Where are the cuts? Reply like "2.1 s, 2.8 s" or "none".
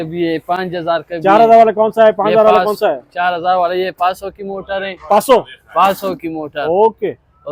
none